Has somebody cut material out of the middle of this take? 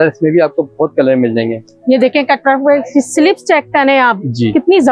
no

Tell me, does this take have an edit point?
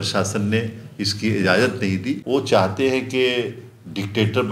yes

